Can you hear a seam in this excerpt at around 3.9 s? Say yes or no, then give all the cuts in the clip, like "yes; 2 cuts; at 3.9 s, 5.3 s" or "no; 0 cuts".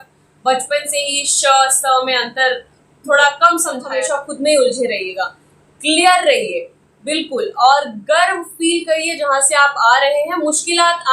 yes; 1 cut; at 3.9 s